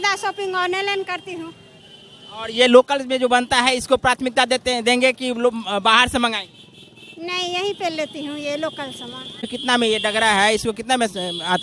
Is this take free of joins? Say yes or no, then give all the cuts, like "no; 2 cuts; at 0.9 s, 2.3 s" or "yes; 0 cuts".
no; 1 cut; at 9.5 s